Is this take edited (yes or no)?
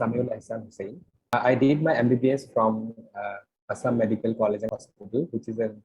yes